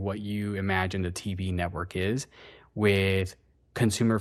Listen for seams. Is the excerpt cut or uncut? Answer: uncut